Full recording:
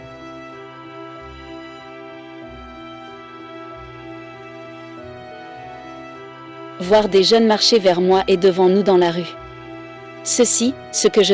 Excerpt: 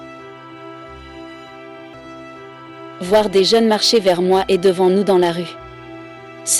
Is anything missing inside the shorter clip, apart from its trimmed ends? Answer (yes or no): yes